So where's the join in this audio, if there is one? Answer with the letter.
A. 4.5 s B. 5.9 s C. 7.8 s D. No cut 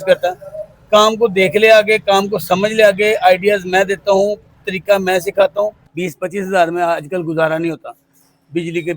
B